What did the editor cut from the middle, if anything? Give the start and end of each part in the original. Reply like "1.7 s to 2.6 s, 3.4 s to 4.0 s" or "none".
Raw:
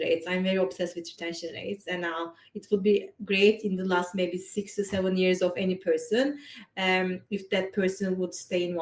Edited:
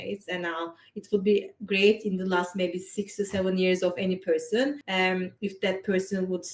6.4 s to 6.7 s